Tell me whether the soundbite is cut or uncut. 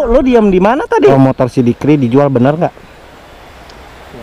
cut